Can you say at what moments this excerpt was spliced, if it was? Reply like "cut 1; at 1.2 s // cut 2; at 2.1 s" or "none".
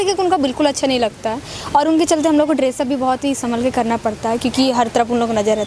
none